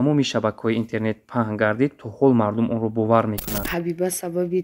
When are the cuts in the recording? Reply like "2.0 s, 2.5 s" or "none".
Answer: 3.6 s